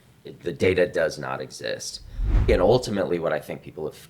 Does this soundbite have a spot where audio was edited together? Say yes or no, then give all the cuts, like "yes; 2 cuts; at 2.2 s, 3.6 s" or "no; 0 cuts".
yes; 1 cut; at 2.5 s